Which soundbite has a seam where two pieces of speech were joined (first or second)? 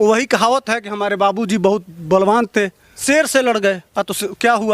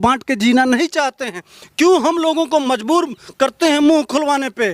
first